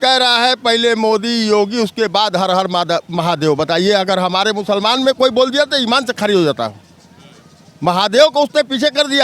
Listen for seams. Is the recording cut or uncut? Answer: uncut